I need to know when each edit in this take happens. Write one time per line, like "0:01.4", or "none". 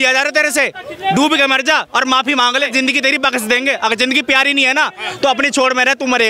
0:02.2